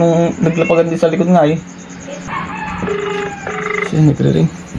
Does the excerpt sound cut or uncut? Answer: cut